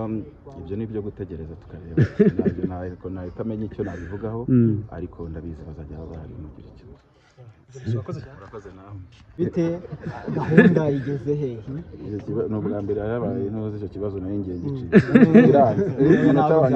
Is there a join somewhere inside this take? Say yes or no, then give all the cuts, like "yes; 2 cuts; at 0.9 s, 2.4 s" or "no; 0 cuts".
yes; 1 cut; at 9.4 s